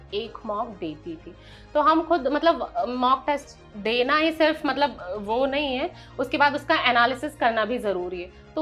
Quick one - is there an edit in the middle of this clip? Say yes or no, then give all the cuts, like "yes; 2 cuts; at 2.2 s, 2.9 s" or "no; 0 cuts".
no; 0 cuts